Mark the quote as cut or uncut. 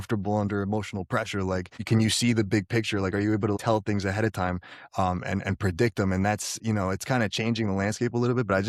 uncut